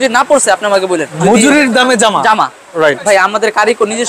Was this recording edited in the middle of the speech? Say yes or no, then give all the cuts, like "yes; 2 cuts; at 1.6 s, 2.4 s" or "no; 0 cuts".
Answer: yes; 1 cut; at 1.1 s